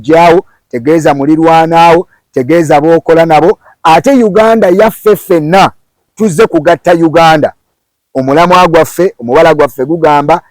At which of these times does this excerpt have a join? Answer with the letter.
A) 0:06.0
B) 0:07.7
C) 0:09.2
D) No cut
A